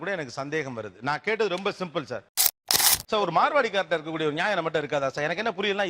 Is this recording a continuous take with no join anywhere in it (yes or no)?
no